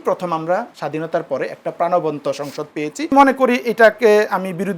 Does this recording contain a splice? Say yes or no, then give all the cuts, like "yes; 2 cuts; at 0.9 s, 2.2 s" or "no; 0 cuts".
yes; 1 cut; at 3.1 s